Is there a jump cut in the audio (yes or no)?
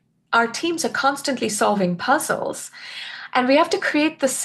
no